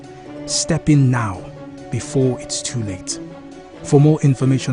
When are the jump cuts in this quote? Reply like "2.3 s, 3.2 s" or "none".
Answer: 2.0 s

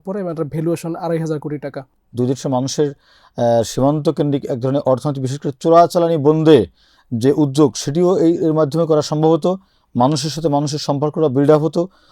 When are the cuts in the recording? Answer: 2.0 s

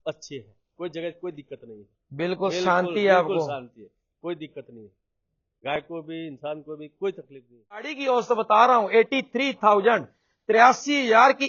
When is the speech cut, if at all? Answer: 7.9 s

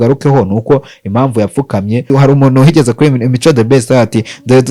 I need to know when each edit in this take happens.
2.1 s

